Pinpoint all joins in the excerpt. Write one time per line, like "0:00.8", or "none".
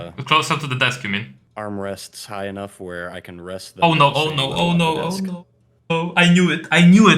0:01.4